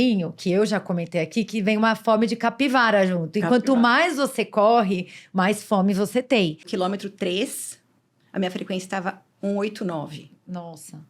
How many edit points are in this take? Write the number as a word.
one